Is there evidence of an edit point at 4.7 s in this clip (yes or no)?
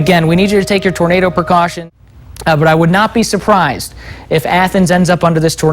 no